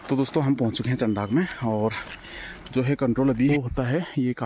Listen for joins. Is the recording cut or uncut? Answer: cut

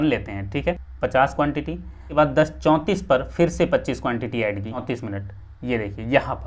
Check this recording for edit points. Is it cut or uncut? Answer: cut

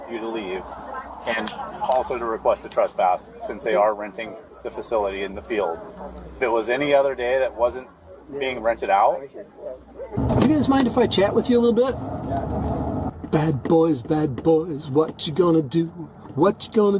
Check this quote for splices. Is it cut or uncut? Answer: cut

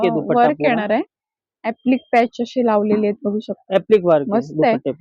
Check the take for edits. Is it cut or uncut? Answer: uncut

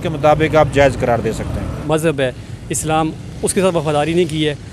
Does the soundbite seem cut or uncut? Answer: cut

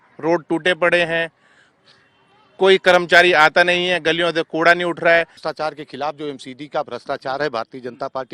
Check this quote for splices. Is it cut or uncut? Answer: cut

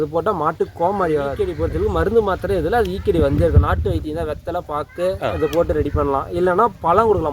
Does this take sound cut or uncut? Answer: cut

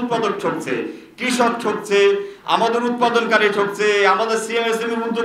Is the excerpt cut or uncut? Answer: uncut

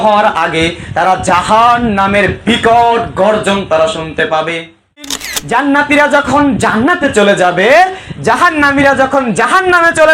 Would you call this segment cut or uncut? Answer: cut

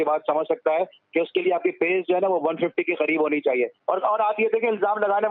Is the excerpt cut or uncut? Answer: cut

